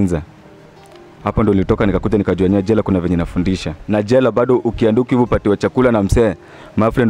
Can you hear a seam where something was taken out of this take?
yes; 1 cut; at 3.8 s

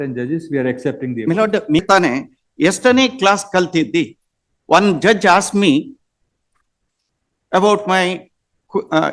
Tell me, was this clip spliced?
yes; 1 cut; at 1.8 s

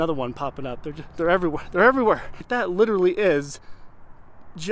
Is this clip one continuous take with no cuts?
no; 1 cut; at 2.4 s

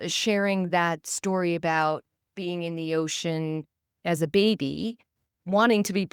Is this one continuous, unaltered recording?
no; 1 cut; at 4.0 s

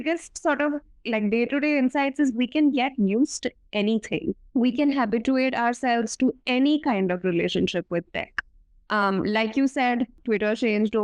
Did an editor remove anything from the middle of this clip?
yes; 2 cuts; at 4.4 s, 10.2 s

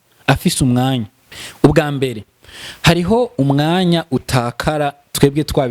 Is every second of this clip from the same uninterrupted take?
no; 1 cut; at 1.2 s

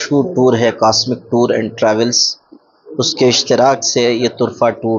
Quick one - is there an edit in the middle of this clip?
no; 0 cuts

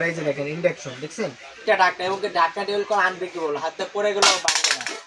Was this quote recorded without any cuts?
no; 1 cut; at 1.6 s

